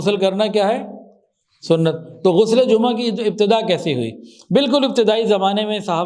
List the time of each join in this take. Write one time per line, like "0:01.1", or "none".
none